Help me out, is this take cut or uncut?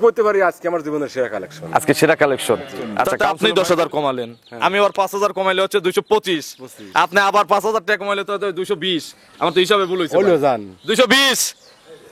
cut